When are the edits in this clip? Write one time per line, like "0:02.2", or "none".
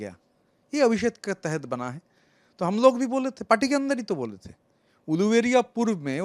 none

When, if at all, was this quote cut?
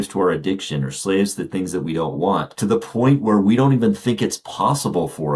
0:02.5

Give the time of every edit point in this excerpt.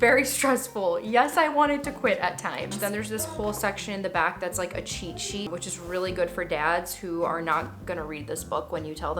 0:02.8
0:05.5

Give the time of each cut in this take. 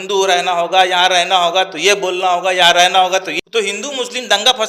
0:03.3

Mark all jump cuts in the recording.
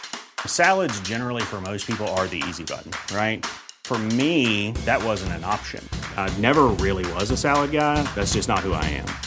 none

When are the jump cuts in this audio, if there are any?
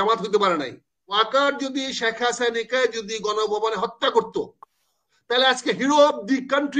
0:01.1

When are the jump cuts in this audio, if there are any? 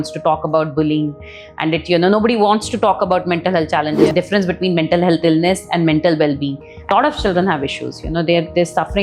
0:04.1
0:06.9

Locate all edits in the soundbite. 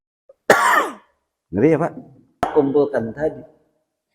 0:02.4

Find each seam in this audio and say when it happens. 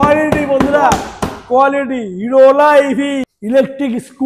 0:03.3

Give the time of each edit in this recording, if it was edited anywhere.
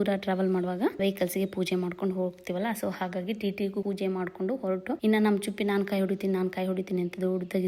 0:01.0
0:03.8
0:05.0

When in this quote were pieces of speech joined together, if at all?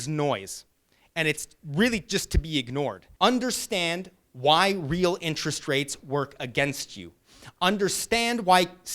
0:03.0

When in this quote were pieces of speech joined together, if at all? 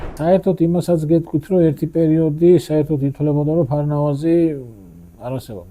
none

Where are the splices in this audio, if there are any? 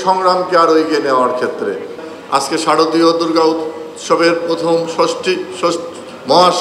0:02.0

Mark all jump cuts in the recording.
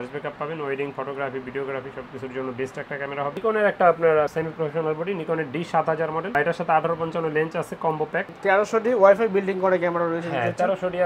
0:03.4
0:08.3

